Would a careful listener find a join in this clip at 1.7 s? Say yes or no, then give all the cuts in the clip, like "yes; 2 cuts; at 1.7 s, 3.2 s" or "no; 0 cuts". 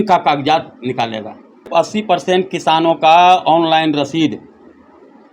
yes; 1 cut; at 1.7 s